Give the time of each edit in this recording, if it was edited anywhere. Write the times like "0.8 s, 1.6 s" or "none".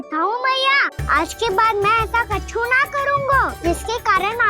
0.9 s, 3.5 s